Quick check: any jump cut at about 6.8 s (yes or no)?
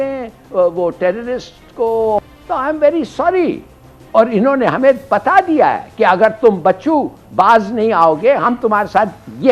no